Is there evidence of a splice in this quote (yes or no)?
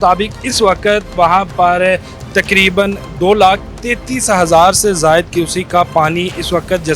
no